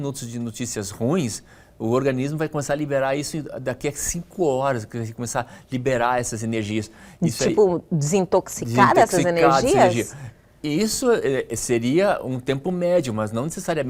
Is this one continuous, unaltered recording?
yes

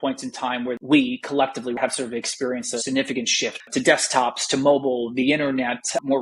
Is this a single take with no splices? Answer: no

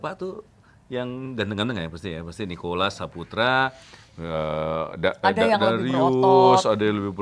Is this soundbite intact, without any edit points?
yes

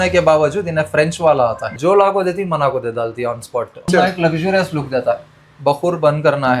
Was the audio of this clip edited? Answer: yes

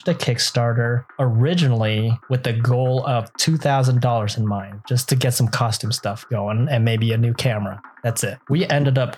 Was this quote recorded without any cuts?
no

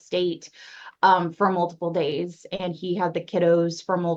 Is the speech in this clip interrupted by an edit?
no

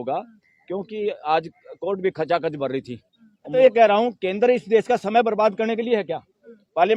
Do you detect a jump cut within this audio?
yes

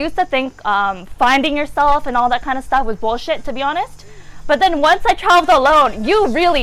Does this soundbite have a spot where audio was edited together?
no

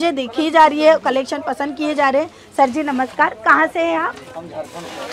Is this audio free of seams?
yes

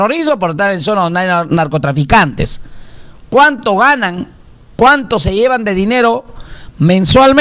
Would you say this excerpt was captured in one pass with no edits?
yes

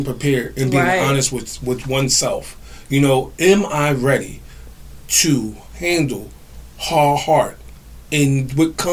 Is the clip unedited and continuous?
yes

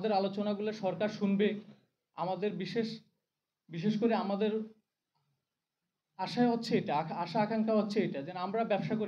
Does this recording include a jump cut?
no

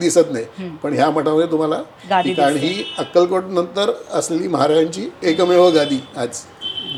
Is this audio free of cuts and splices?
yes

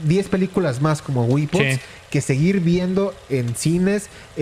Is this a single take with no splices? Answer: yes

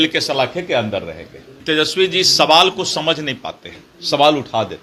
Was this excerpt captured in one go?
yes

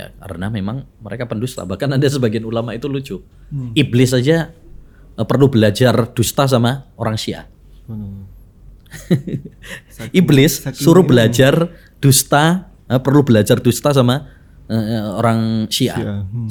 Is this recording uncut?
yes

